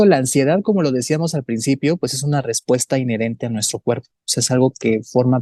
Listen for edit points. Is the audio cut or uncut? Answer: uncut